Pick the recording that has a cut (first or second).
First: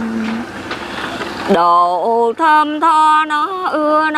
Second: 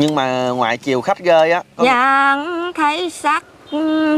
second